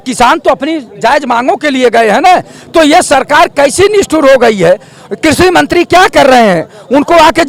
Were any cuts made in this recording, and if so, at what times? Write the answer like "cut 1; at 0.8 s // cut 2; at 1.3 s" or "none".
none